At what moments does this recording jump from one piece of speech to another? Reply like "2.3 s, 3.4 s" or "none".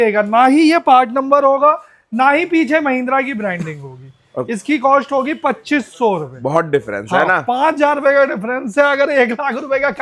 none